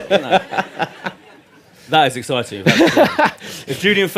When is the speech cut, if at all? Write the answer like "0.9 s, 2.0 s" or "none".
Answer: 1.9 s